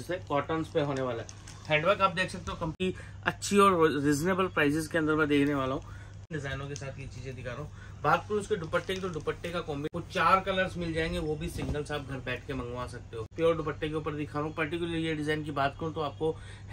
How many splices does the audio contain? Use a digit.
4